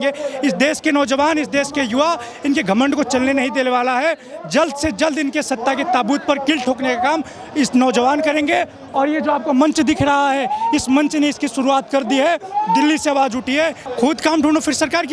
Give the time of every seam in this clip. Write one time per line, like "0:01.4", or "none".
0:13.8